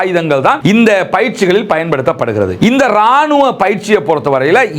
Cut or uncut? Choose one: uncut